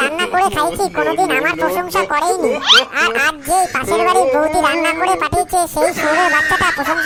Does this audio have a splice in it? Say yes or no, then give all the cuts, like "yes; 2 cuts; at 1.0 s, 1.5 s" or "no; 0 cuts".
no; 0 cuts